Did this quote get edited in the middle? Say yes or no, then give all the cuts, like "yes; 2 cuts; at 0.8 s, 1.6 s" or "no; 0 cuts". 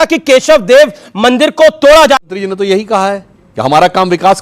yes; 1 cut; at 2.2 s